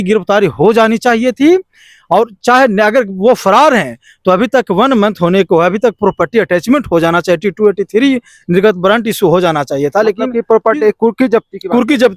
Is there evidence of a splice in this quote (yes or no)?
no